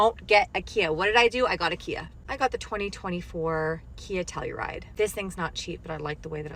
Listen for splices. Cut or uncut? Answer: uncut